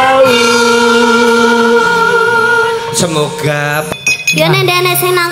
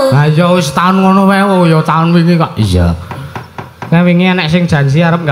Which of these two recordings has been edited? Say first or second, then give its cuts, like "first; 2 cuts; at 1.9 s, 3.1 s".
first; 1 cut; at 3.9 s